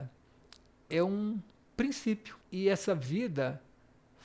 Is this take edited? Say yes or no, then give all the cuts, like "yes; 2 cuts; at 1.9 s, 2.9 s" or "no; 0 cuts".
yes; 1 cut; at 2.4 s